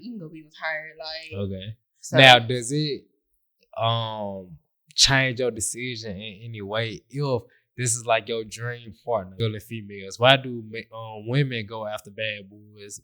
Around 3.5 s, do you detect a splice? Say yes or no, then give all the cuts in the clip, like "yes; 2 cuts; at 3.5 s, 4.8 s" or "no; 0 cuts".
no; 1 cut; at 9.4 s